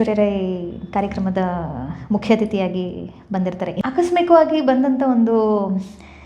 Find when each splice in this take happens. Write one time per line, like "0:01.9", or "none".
0:03.7